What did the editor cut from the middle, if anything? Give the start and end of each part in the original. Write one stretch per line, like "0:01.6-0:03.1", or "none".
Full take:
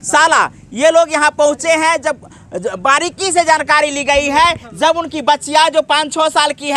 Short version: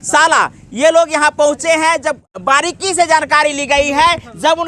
0:02.3-0:02.7